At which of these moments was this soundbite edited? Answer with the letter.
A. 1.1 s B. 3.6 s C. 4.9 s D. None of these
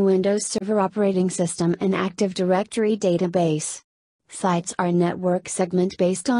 D